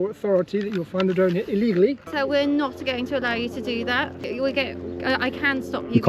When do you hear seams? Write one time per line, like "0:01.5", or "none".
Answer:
0:02.1
0:04.2